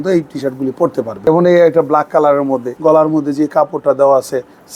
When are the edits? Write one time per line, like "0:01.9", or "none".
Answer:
0:01.2
0:02.7